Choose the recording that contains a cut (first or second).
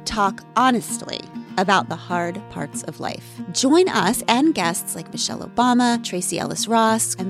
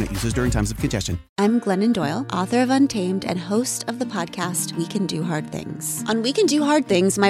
second